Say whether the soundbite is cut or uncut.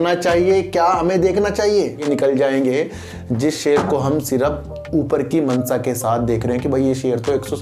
cut